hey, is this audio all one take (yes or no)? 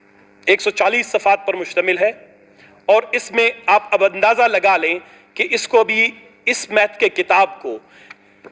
yes